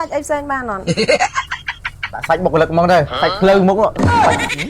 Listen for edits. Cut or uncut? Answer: cut